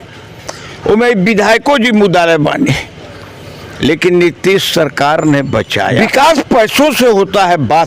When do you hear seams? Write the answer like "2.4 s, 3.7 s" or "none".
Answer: 6.0 s